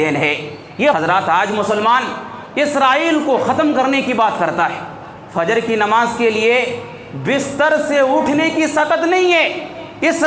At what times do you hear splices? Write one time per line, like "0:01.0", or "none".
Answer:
0:00.9